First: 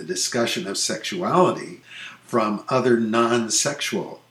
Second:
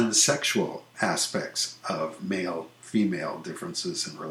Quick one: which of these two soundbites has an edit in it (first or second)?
first